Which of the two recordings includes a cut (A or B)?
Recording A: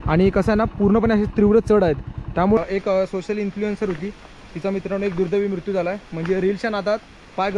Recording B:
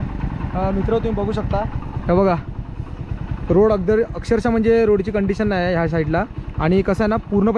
A